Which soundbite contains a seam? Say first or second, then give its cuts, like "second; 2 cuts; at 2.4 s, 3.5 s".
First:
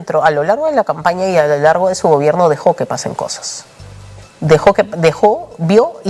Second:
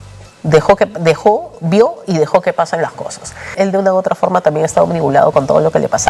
second; 1 cut; at 3.5 s